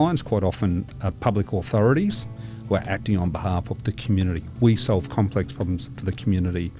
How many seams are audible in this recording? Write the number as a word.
zero